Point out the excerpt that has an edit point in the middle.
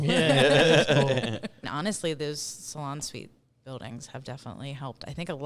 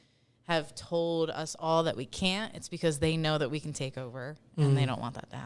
first; 1 cut; at 1.6 s

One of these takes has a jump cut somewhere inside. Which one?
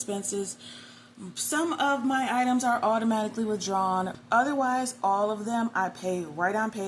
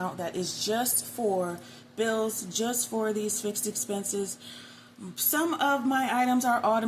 first; 1 cut; at 4.2 s

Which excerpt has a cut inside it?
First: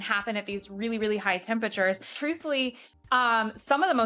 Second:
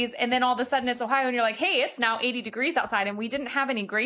first; 1 cut; at 2.1 s

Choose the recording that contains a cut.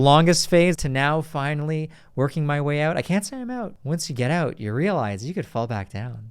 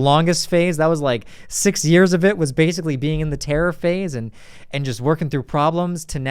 first; 2 cuts; at 0.8 s, 3.7 s

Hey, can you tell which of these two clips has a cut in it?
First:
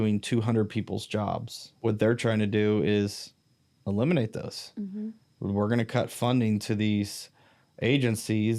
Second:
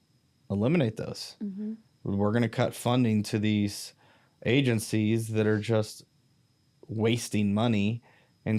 first; 1 cut; at 1.6 s

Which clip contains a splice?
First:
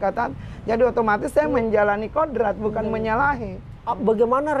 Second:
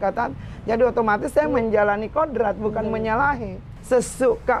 second; 1 cut; at 3.7 s

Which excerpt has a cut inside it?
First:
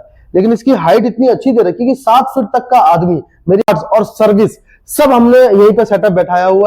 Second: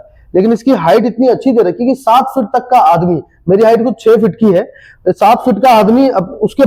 first; 1 cut; at 3.6 s

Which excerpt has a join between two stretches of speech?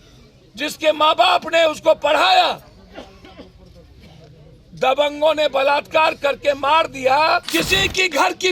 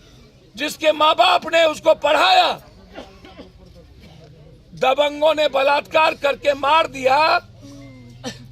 first; 1 cut; at 7.5 s

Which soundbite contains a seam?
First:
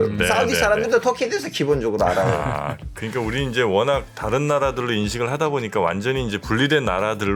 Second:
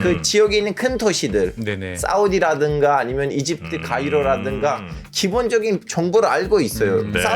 second; 1 cut; at 5.9 s

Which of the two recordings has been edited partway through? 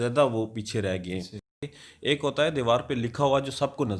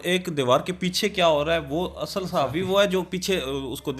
first; 1 cut; at 1.6 s

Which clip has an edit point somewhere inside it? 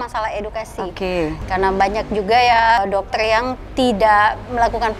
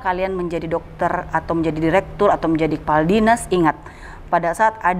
first; 2 cuts; at 1.4 s, 2.8 s

